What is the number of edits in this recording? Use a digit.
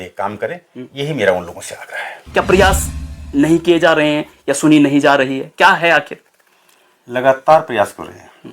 1